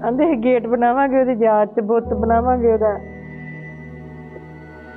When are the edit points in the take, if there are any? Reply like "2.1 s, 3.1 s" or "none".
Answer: none